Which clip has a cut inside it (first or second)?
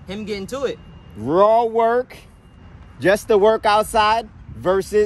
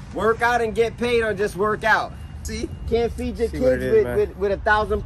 second